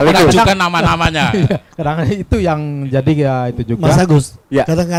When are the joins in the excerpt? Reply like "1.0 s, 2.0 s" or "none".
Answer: none